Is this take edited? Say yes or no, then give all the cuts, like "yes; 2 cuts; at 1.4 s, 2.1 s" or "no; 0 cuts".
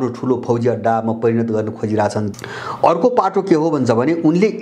yes; 1 cut; at 2.3 s